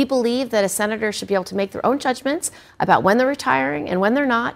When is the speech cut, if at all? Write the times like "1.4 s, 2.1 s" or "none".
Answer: none